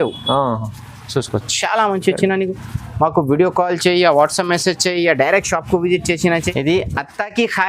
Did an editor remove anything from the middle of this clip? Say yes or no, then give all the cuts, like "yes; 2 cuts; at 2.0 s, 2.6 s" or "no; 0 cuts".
yes; 1 cut; at 6.5 s